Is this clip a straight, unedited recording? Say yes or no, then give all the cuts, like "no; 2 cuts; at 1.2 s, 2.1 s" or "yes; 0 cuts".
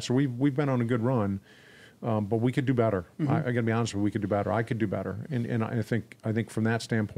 yes; 0 cuts